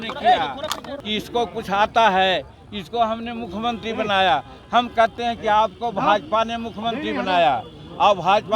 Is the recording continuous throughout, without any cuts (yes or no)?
no